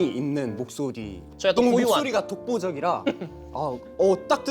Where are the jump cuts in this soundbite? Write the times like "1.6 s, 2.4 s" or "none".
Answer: 1.3 s